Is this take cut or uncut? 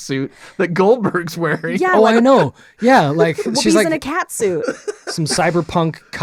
uncut